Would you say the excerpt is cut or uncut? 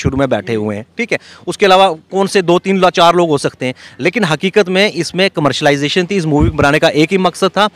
uncut